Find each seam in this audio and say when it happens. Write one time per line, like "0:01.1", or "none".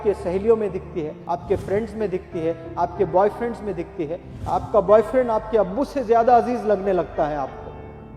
0:01.2